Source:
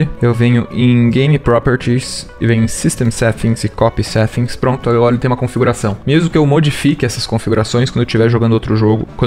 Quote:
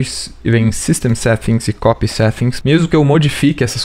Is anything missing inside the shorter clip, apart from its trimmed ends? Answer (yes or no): yes